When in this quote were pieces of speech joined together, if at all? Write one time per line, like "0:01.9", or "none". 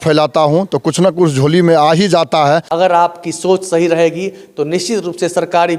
0:02.7

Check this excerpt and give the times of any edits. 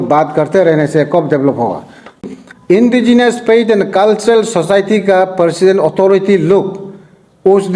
0:02.2

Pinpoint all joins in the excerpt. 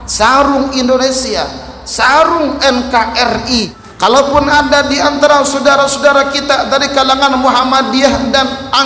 0:03.8

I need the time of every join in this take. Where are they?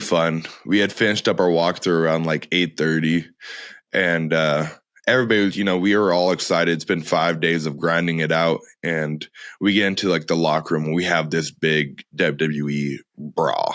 none

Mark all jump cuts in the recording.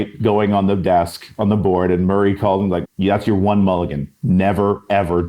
0:02.8

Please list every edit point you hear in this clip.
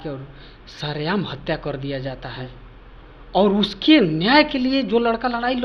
none

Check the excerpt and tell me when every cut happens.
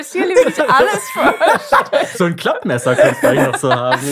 0:02.1

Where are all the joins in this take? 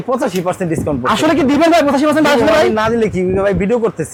none

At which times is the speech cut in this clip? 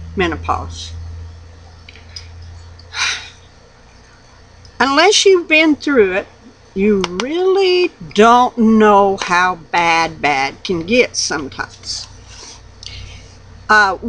0:10.1

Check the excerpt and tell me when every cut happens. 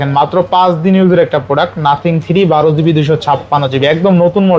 none

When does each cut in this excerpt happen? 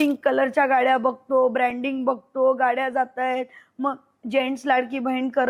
none

